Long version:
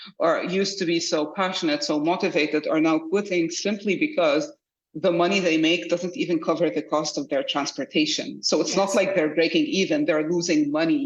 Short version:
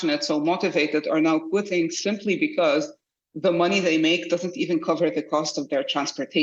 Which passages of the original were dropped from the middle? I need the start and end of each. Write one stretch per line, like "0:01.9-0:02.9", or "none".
none